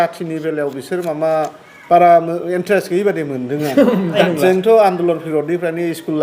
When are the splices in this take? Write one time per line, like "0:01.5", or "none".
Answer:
0:04.2